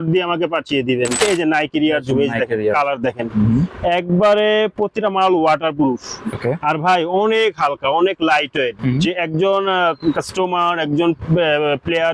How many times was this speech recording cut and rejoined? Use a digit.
1